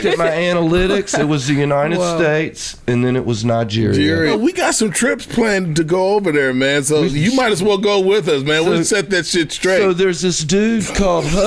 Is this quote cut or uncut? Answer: cut